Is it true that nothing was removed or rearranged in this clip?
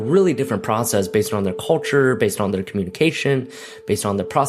yes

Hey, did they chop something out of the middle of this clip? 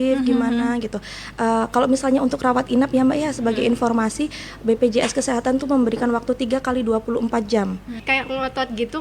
yes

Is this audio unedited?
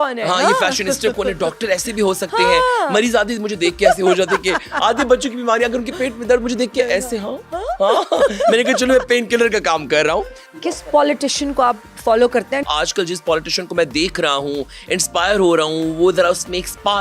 no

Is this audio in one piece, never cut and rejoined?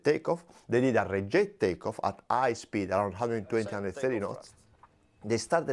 yes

